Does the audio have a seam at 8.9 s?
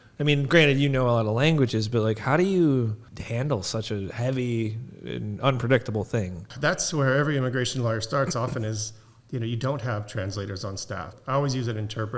no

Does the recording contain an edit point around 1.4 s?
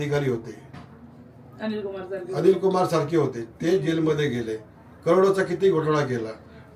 no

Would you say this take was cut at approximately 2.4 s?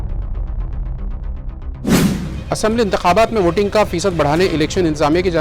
yes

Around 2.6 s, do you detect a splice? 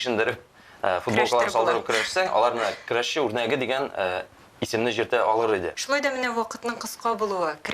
no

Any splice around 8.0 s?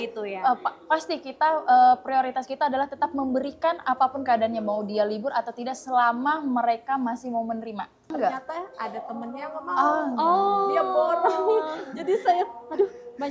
yes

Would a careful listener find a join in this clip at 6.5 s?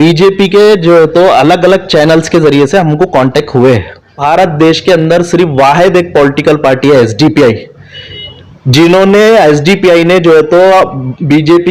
no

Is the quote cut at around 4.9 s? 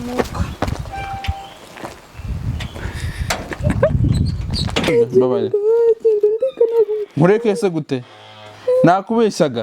yes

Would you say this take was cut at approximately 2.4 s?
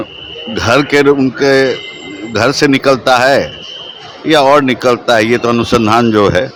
no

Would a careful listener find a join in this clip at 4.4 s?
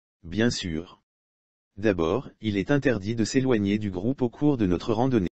yes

